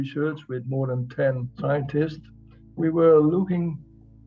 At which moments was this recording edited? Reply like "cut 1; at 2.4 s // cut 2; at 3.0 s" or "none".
cut 1; at 1.5 s // cut 2; at 2.8 s